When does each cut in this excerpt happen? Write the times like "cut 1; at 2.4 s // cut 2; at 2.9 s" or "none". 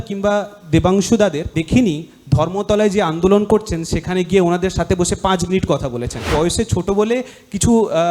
cut 1; at 1.6 s // cut 2; at 6.2 s